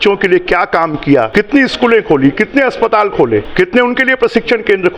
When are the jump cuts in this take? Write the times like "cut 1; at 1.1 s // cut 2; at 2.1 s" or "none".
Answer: cut 1; at 1.3 s // cut 2; at 3.5 s